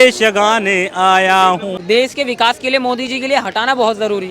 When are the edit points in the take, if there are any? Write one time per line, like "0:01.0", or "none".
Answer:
0:01.7